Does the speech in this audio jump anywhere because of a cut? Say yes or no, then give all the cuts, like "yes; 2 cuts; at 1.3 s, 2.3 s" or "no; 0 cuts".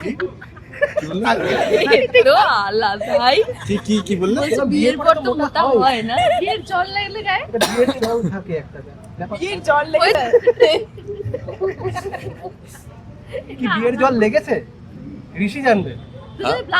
no; 0 cuts